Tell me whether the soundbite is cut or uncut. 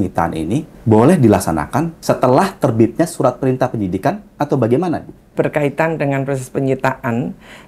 uncut